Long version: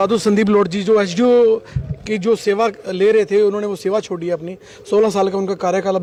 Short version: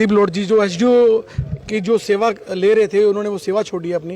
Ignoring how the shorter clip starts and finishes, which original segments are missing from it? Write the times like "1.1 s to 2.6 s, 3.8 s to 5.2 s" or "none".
none